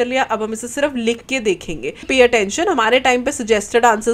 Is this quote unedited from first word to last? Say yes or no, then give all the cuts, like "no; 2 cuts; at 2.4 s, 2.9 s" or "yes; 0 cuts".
no; 1 cut; at 2.0 s